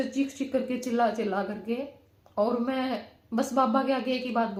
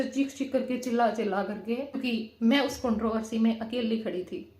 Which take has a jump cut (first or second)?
second